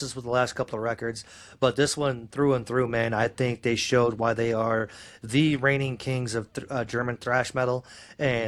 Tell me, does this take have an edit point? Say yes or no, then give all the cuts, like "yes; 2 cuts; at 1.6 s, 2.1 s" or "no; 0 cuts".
no; 0 cuts